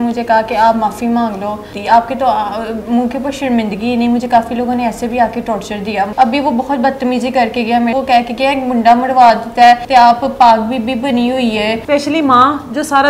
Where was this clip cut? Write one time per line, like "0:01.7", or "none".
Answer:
0:01.7
0:06.1
0:07.9
0:09.8
0:11.8